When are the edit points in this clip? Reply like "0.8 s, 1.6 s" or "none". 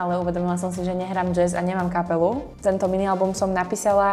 2.5 s